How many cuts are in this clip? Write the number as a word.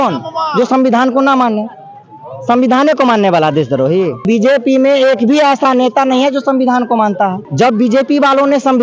two